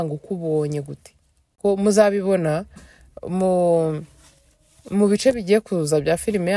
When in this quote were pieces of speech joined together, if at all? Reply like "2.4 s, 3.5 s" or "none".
1.6 s